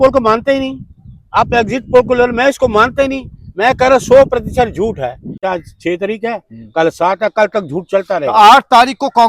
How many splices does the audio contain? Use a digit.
1